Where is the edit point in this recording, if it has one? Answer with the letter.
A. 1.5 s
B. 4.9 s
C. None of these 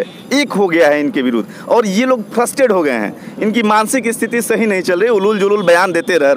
C